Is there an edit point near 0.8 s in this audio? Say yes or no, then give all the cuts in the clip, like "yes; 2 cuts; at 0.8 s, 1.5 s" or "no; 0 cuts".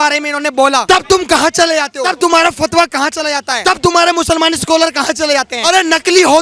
yes; 4 cuts; at 0.8 s, 2.0 s, 3.5 s, 5.5 s